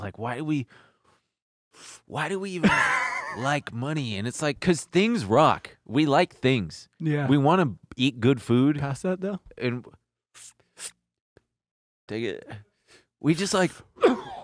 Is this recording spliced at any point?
yes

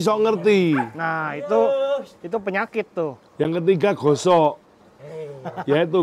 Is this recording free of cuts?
yes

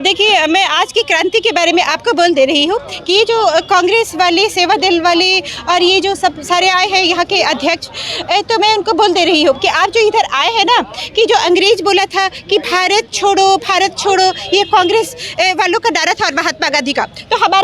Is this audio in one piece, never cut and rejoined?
yes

